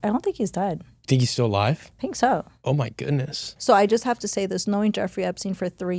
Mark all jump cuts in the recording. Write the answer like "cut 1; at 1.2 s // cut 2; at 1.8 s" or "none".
cut 1; at 3.5 s